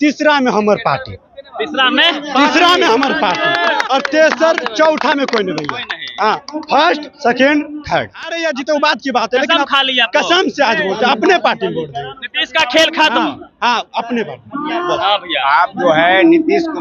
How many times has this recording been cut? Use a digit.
1